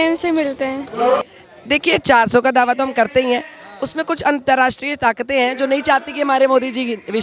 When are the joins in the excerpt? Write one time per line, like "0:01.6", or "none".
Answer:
0:01.2